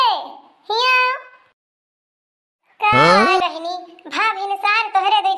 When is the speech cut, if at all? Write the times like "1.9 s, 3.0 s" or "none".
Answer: none